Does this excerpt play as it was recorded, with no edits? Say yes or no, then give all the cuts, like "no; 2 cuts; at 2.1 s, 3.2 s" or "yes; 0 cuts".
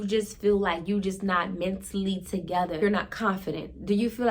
no; 1 cut; at 2.8 s